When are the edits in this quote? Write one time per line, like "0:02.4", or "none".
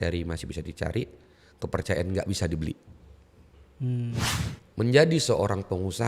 0:04.3